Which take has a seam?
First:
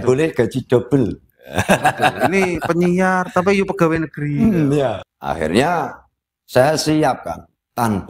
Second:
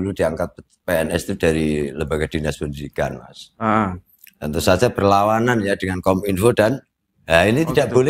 first; 1 cut; at 5.1 s

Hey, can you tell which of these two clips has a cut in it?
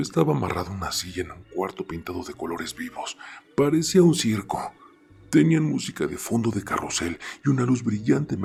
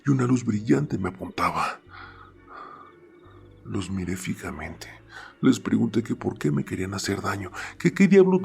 second; 1 cut; at 3.6 s

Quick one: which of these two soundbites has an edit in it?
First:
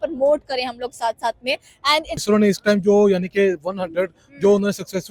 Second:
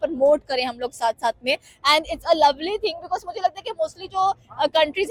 first; 1 cut; at 2.2 s

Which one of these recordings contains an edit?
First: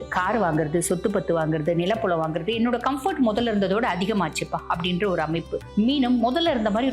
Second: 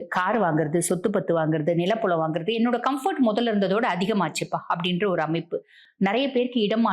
first; 1 cut; at 5.6 s

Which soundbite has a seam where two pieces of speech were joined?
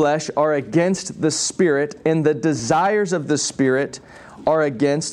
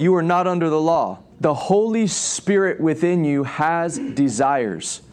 second; 1 cut; at 1.2 s

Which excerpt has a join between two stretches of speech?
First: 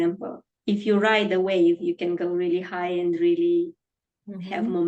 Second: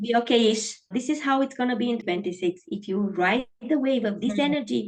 second; 2 cuts; at 0.9 s, 2.0 s

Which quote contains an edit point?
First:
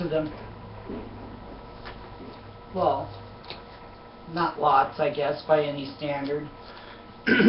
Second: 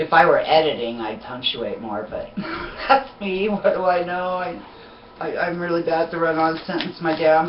second; 1 cut; at 1.9 s

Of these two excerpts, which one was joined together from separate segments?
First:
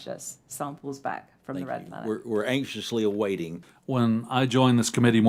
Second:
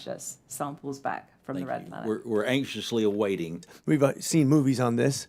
second; 1 cut; at 3.7 s

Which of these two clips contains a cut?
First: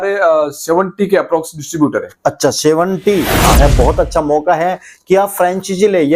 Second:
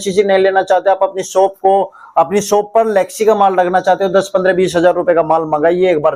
first; 1 cut; at 3.6 s

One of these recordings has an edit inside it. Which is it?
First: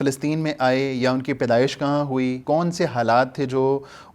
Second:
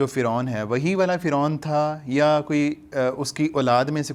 first; 1 cut; at 2.4 s

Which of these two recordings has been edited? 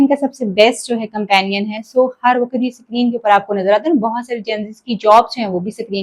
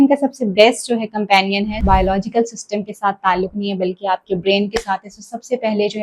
second; 1 cut; at 1.8 s

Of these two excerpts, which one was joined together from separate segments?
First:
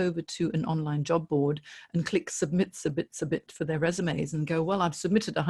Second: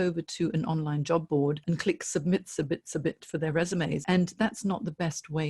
second; 2 cuts; at 1.6 s, 4.0 s

